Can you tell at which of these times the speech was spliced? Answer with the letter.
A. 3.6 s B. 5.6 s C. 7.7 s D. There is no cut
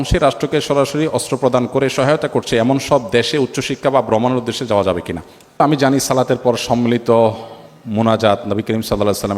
B